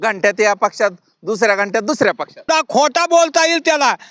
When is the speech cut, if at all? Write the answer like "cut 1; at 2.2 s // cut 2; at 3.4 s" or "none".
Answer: cut 1; at 2.5 s